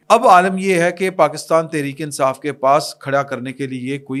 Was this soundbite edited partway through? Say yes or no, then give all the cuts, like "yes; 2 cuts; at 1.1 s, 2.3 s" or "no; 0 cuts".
no; 0 cuts